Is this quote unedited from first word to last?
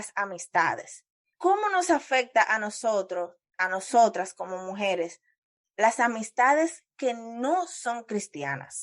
no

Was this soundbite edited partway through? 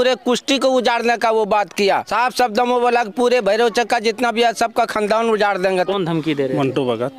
yes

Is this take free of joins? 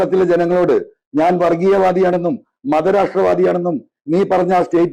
yes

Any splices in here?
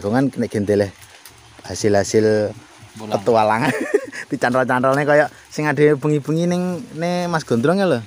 no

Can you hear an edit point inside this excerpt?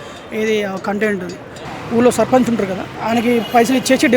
yes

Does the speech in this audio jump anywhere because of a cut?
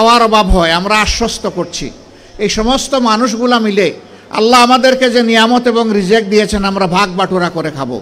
no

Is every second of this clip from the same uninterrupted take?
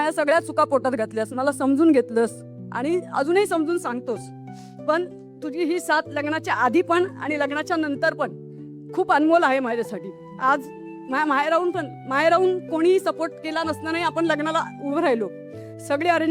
yes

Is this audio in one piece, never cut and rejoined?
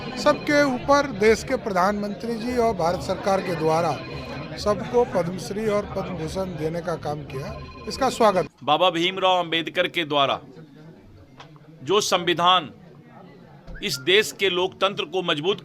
no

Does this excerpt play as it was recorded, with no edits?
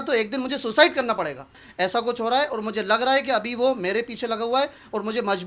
no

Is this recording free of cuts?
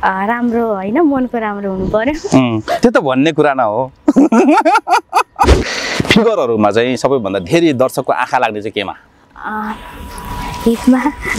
no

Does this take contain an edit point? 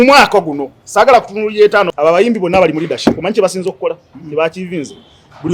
yes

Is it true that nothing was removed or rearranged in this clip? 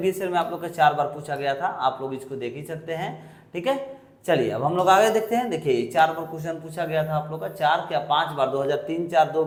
yes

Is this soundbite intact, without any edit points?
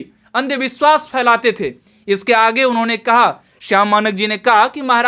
yes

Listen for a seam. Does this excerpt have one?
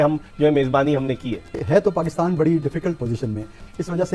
no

